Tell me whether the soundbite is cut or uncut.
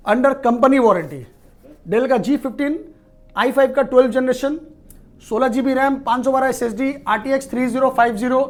uncut